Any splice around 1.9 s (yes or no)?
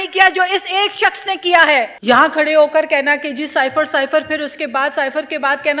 yes